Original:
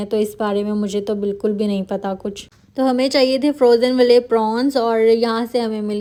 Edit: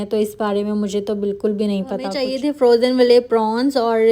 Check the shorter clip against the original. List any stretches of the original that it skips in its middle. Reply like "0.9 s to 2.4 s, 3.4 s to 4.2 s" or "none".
2.3 s to 3.3 s